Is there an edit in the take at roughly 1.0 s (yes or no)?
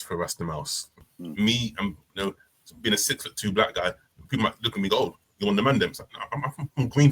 yes